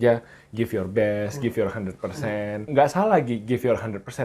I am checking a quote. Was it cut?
yes; 1 cut; at 2.7 s

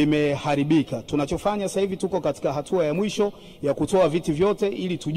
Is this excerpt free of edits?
no; 1 cut; at 1.0 s

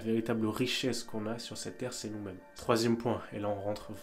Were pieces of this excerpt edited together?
yes; 1 cut; at 2.5 s

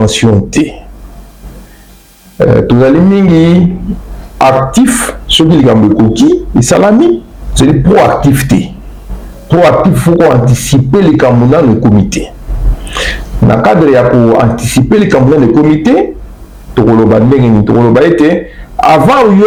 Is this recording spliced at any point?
no; 0 cuts

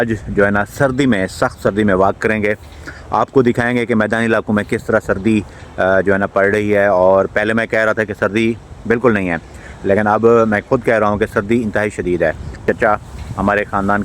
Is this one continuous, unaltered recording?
no; 1 cut; at 12.6 s

